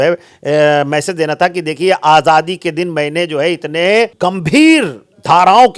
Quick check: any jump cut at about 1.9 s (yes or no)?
no